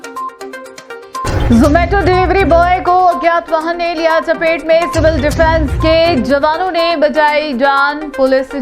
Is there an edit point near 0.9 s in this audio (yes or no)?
yes